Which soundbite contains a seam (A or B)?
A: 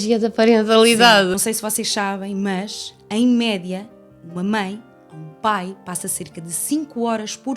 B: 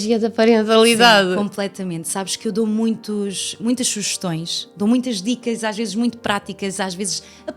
A